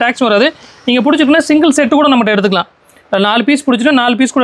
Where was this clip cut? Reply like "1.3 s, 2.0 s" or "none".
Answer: none